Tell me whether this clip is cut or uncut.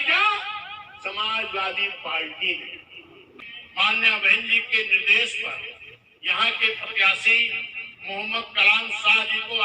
cut